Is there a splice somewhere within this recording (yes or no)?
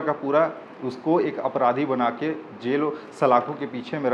no